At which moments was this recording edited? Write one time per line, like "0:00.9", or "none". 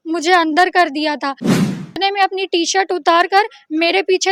0:01.8